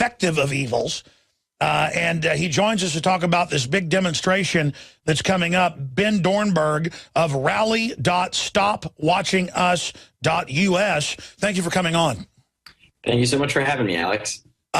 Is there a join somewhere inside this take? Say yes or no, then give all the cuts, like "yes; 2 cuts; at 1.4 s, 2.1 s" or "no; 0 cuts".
yes; 1 cut; at 4.1 s